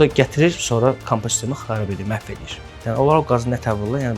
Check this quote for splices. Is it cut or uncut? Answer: cut